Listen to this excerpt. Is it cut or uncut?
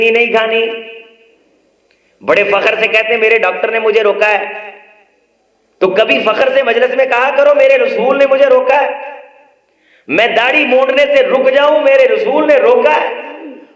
uncut